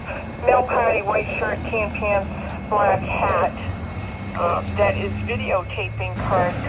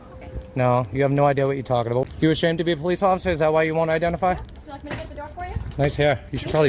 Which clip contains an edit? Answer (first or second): second